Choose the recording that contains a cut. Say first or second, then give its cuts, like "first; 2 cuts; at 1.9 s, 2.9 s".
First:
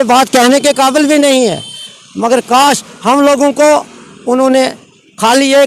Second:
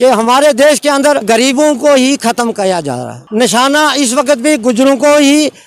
second; 2 cuts; at 1.3 s, 3.2 s